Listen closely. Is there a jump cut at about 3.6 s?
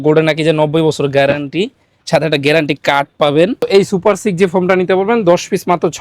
yes; 1 cut; at 3.6 s

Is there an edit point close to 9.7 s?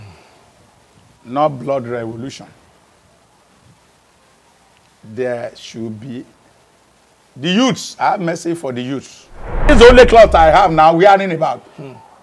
yes; 1 cut; at 9.7 s

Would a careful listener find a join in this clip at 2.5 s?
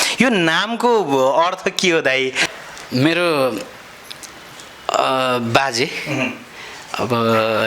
yes; 1 cut; at 2.5 s

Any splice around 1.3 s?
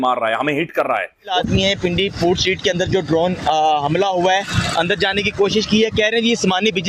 yes; 1 cut; at 1.3 s

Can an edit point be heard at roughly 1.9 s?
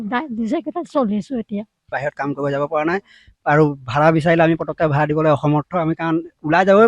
yes; 1 cut; at 1.9 s

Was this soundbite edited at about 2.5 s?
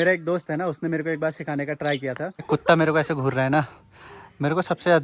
yes; 1 cut; at 2.5 s

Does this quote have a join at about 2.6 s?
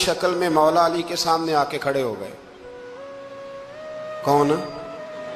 no; 0 cuts

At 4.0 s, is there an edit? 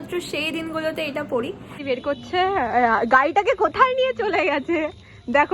no; 1 cut; at 1.8 s

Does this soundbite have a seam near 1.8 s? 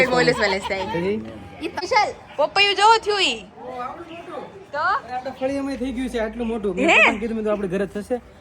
yes; 1 cut; at 1.8 s

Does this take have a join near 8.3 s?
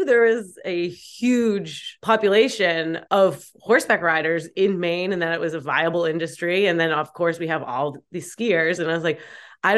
no; 2 cuts; at 1.9 s, 3.0 s

